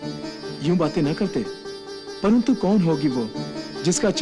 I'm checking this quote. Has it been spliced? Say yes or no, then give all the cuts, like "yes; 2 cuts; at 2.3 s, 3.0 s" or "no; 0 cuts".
no; 0 cuts